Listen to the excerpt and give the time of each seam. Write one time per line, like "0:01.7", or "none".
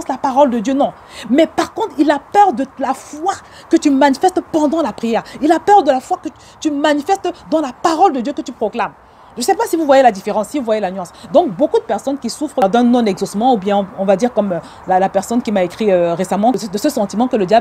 0:12.6
0:16.5